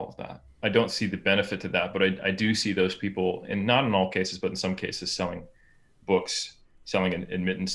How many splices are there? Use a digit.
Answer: 0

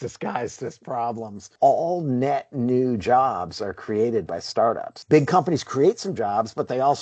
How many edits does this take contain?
1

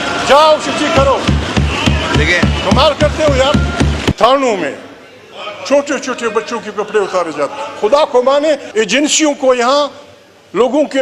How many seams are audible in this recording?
2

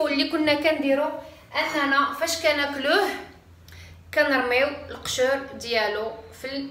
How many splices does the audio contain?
0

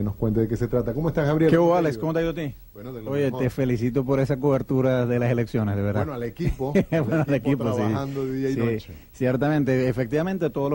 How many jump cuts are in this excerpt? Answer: 0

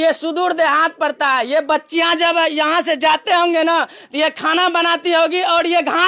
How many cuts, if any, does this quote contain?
0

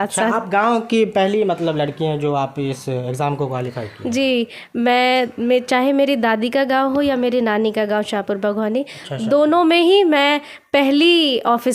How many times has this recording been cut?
0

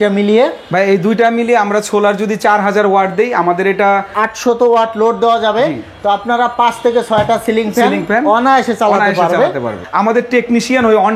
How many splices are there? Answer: 2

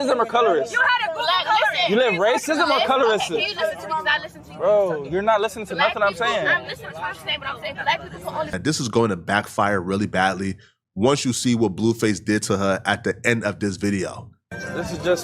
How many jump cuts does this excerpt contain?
1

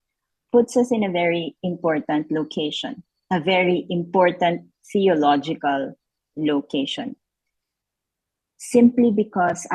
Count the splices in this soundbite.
0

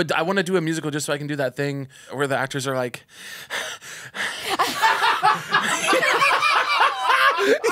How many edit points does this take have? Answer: 1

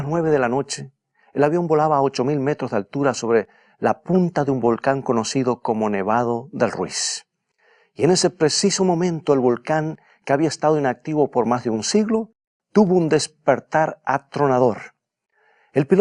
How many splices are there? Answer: 0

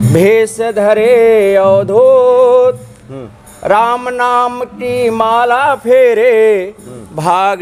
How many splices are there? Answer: 0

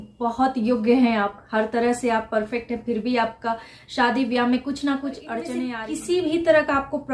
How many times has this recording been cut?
1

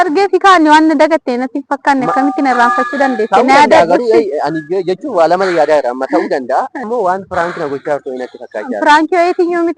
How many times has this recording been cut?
1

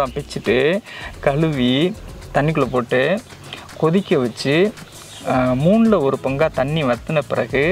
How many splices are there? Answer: 0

